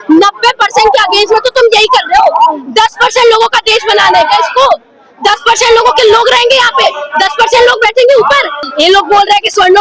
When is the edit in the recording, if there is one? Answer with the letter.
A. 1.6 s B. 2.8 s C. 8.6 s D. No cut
C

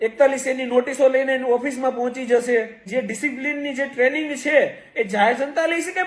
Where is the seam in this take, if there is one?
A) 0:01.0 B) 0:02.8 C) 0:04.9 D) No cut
B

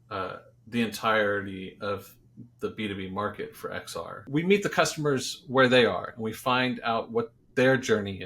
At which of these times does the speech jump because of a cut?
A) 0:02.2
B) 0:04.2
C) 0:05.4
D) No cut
B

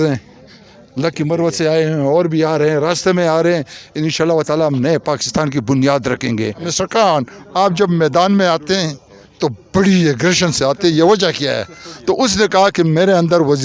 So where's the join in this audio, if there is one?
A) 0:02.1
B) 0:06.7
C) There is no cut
B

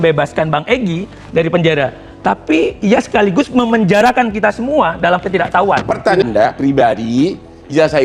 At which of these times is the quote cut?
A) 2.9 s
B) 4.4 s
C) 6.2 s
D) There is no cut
C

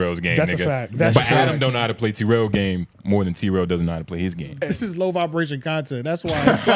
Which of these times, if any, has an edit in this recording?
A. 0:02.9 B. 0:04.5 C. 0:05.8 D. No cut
B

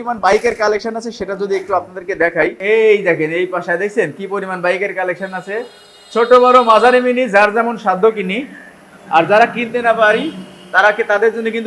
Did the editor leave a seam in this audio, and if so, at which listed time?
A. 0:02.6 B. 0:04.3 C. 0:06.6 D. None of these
A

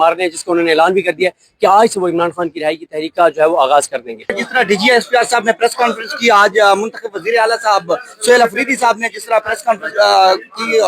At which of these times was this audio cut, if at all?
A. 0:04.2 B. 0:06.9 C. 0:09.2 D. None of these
A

